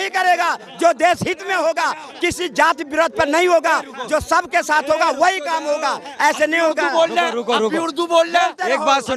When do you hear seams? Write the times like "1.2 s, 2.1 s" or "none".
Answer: none